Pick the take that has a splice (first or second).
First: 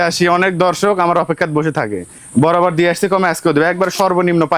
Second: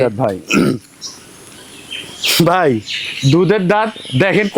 first